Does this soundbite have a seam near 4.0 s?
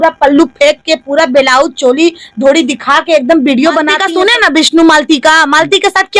yes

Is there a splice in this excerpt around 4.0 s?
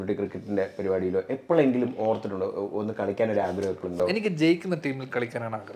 yes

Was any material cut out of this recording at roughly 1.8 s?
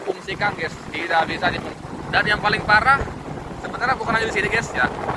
yes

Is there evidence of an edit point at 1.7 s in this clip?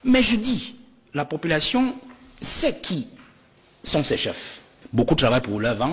no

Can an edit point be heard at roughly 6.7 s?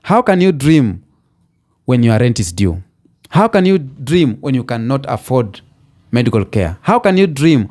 no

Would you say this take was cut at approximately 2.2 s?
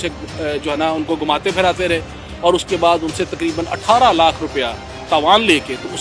no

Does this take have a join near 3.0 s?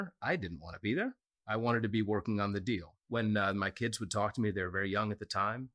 yes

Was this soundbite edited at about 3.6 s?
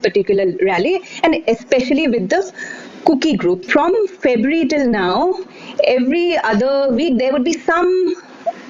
yes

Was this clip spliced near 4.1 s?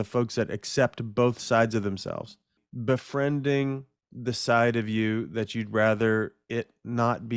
no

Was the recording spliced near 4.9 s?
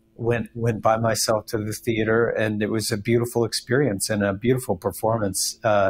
no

